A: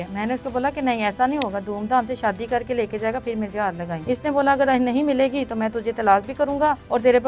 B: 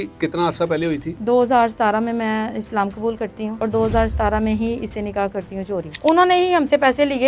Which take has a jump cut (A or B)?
B